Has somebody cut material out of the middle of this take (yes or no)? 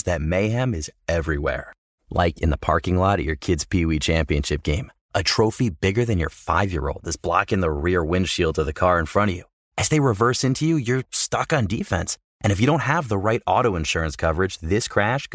no